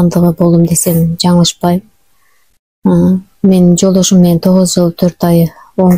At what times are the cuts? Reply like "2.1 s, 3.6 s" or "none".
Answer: none